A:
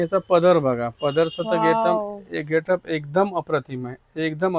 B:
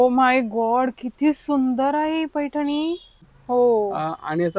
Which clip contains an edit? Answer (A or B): B